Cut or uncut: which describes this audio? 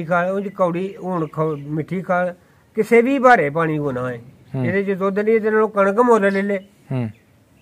uncut